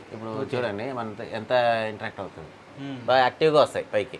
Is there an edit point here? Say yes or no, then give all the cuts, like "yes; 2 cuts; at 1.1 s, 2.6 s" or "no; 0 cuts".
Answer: no; 0 cuts